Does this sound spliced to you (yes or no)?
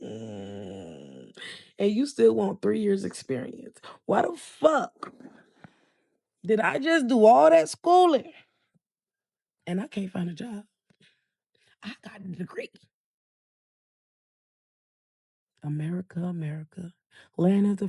no